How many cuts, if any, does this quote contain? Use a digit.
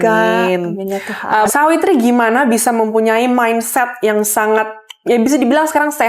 1